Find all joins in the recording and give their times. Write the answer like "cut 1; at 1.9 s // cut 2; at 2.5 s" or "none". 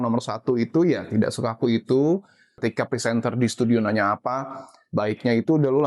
cut 1; at 2.5 s